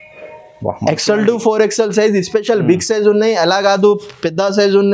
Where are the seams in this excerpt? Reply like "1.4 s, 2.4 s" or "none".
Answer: none